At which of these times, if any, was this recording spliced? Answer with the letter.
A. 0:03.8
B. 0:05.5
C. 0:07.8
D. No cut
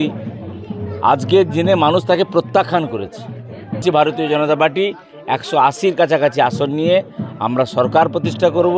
A